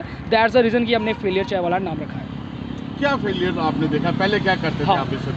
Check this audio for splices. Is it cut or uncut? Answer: uncut